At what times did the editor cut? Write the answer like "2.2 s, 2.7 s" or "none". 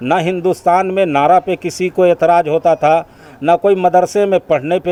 none